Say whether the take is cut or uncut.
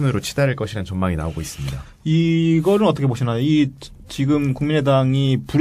uncut